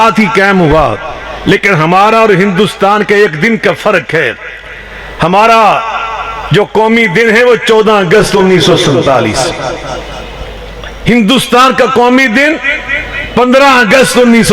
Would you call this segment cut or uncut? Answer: uncut